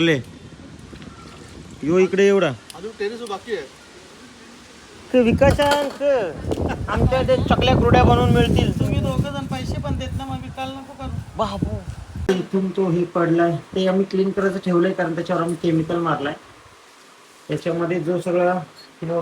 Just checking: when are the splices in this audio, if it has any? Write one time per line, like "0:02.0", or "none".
0:12.3